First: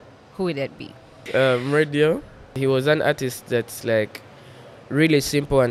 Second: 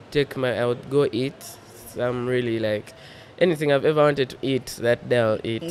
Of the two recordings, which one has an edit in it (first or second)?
first